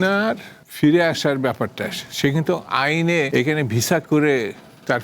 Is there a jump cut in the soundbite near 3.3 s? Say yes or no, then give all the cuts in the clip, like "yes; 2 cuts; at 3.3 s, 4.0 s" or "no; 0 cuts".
yes; 1 cut; at 3.3 s